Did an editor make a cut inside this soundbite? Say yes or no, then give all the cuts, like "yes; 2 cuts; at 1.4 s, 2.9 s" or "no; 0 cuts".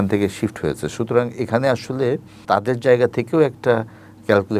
yes; 1 cut; at 2.3 s